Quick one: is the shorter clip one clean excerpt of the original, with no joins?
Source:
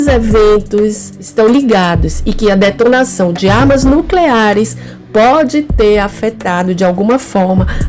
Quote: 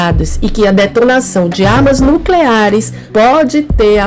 no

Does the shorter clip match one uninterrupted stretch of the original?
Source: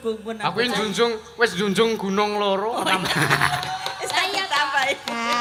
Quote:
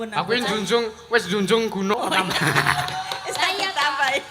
no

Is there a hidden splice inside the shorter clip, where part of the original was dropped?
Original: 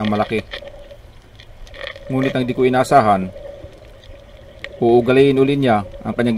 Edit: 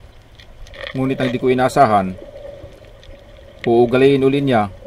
yes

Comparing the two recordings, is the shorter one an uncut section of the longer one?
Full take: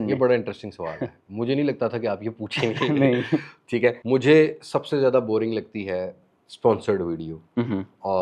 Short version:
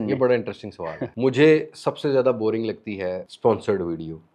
no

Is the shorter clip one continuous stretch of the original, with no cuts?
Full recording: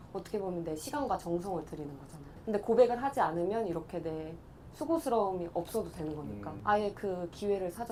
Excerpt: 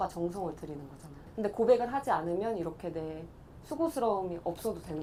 yes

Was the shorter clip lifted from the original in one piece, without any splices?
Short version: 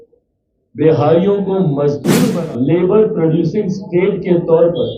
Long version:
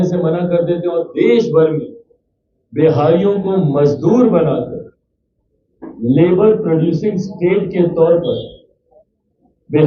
no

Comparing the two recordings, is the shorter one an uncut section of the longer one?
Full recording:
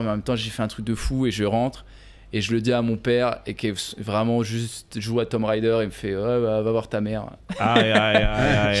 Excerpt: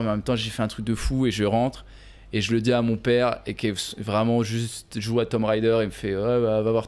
yes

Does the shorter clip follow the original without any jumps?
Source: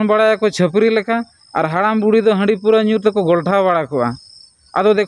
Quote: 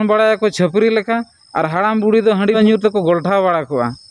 no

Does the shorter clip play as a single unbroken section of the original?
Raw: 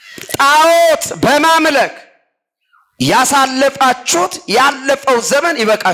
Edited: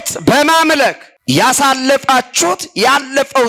no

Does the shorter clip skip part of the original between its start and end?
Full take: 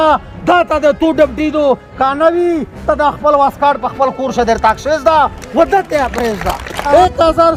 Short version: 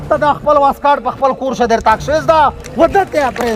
no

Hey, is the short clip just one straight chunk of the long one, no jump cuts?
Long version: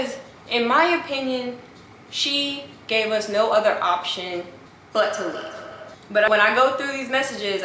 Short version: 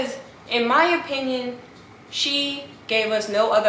yes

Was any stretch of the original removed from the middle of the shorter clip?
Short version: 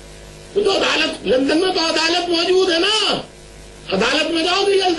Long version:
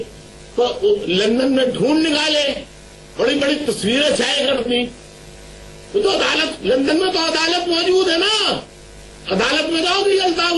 no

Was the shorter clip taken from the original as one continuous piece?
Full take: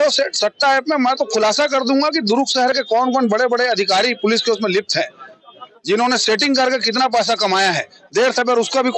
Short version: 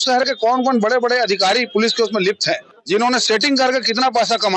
no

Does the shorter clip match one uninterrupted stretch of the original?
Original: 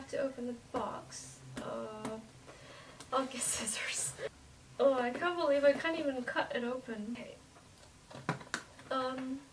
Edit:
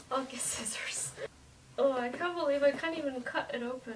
yes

